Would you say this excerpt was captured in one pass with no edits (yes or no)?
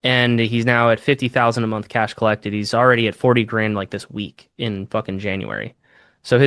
yes